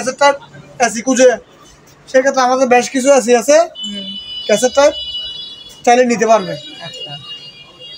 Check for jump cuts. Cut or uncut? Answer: uncut